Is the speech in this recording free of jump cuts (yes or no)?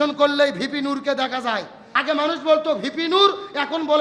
no